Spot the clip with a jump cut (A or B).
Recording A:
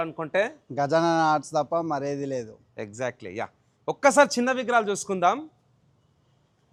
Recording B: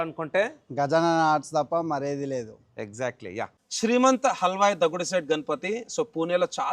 B